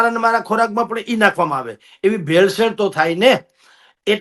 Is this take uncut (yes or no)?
yes